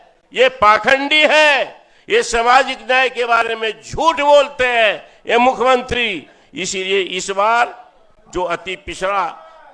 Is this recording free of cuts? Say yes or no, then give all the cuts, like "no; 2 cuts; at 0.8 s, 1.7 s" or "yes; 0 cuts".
yes; 0 cuts